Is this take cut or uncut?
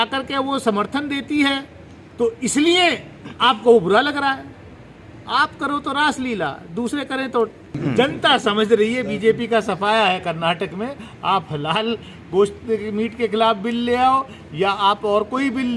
uncut